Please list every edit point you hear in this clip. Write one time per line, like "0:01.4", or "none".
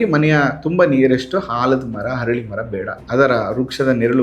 0:03.0